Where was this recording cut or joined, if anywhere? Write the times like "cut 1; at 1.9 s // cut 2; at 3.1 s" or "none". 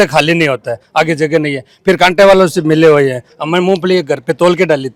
none